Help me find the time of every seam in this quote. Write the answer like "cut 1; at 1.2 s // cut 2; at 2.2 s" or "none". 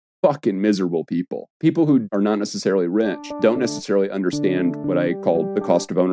cut 1; at 1.4 s // cut 2; at 2.0 s // cut 3; at 3.3 s // cut 4; at 5.2 s